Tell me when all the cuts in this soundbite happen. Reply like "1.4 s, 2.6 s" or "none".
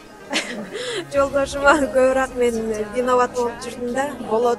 none